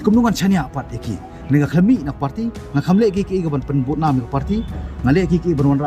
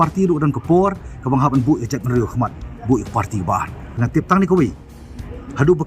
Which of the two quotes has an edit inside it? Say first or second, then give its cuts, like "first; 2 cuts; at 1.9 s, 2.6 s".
second; 1 cut; at 4.0 s